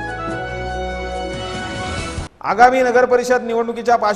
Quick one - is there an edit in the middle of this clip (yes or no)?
no